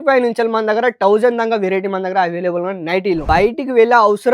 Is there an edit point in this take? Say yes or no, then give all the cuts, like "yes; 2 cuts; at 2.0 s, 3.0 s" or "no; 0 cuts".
yes; 1 cut; at 3.2 s